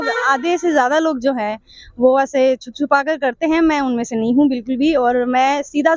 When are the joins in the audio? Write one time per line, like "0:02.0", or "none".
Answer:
none